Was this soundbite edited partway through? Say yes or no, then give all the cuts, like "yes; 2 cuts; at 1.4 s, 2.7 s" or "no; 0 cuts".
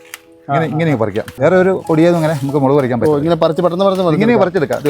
yes; 1 cut; at 1.3 s